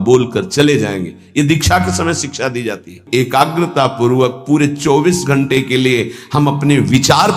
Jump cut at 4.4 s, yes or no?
no